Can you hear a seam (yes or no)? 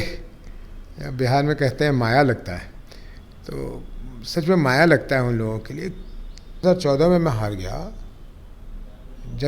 yes